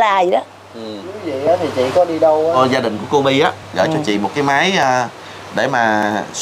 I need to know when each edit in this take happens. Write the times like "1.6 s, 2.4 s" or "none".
2.6 s